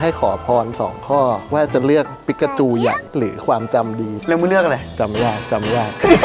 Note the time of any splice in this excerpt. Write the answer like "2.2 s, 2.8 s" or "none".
none